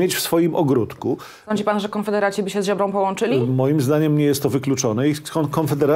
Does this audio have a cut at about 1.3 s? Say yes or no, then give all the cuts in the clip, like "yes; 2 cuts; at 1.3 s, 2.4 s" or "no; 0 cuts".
yes; 1 cut; at 1.3 s